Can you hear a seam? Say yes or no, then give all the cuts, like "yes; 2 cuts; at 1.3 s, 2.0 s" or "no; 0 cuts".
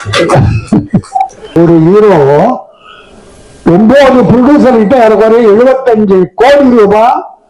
yes; 1 cut; at 1.6 s